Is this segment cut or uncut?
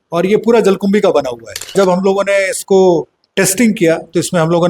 cut